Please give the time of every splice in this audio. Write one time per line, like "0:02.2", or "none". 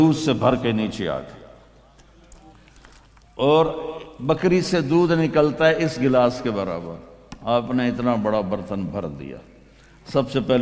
none